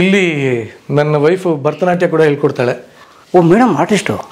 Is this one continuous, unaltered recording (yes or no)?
yes